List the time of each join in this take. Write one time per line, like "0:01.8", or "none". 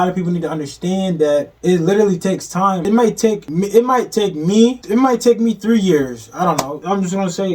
0:01.5
0:03.1
0:04.8
0:06.8